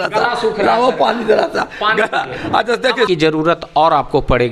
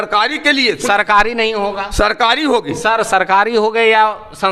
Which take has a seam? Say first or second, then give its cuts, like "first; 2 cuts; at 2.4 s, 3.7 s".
first; 1 cut; at 3.1 s